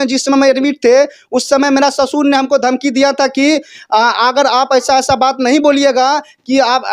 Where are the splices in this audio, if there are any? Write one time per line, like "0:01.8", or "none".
none